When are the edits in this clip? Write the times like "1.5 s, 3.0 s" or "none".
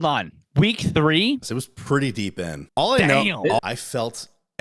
1.4 s, 2.6 s, 3.6 s